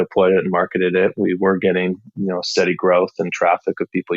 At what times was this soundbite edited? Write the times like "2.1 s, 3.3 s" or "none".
none